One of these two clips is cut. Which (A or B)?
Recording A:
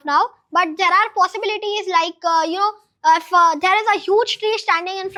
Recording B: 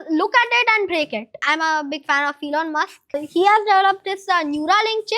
B